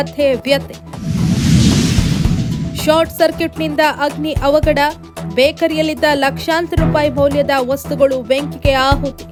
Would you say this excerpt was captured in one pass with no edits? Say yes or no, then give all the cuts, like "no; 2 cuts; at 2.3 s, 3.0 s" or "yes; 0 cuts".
yes; 0 cuts